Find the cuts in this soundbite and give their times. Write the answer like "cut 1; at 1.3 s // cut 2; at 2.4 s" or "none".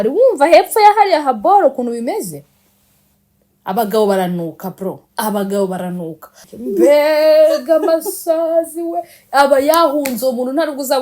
cut 1; at 6.4 s

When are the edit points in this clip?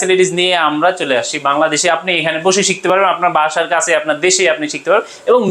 none

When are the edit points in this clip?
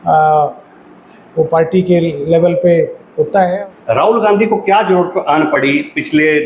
cut 1; at 3.5 s

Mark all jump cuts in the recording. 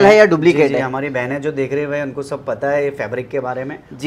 none

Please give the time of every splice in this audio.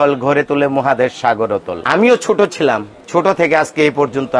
none

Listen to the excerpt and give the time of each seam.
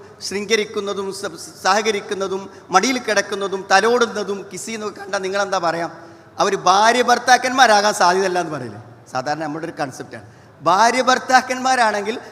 none

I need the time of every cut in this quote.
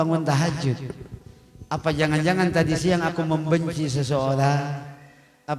none

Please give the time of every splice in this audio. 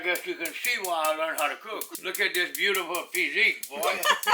cut 1; at 1.9 s

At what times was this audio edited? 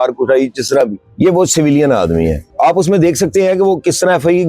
cut 1; at 1.0 s // cut 2; at 2.4 s

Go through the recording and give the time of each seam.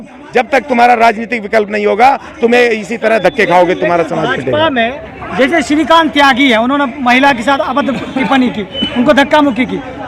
none

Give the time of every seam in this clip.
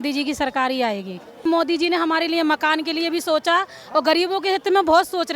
cut 1; at 1.4 s

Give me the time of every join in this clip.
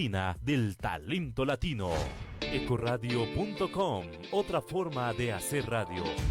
cut 1; at 2.3 s

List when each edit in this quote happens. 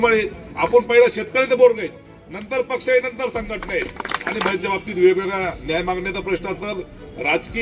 cut 1; at 4.5 s

